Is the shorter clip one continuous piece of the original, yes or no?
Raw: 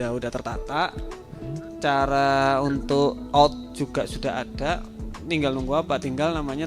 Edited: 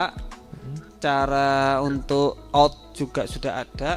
yes